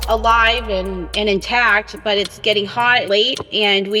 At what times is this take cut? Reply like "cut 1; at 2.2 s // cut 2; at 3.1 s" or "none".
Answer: cut 1; at 3.0 s